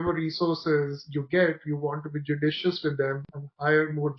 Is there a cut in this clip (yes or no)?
no